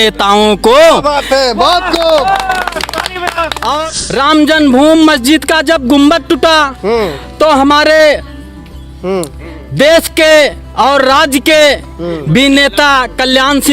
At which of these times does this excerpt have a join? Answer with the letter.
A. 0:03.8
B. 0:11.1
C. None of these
A